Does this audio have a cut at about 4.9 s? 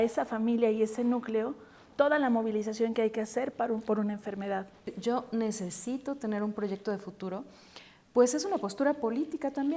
yes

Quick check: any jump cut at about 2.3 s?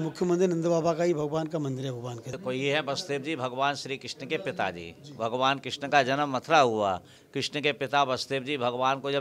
yes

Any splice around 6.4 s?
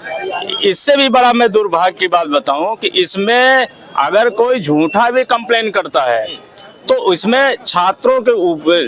no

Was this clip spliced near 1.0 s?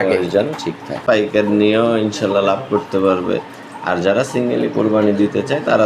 yes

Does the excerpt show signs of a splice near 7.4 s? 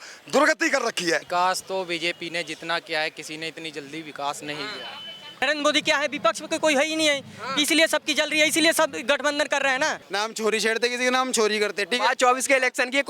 no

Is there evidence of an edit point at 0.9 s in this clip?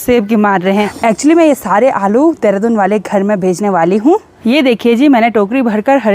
yes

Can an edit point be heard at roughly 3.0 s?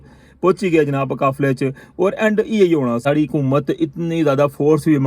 yes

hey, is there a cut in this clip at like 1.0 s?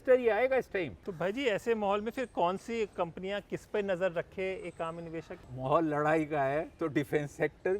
yes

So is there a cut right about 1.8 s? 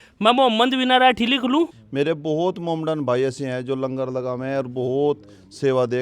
yes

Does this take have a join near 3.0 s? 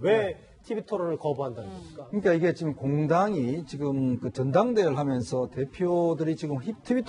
no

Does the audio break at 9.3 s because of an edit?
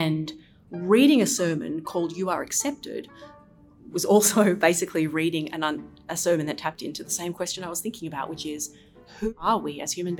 yes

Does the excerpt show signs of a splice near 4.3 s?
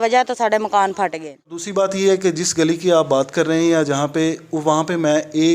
no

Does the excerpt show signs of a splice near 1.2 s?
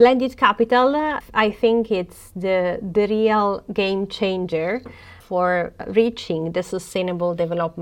yes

